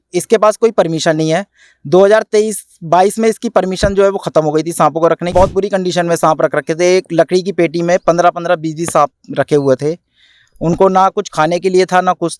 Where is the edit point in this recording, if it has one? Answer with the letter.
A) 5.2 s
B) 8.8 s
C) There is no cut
A